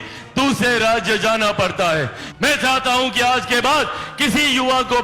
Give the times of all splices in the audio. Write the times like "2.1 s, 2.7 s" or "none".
2.2 s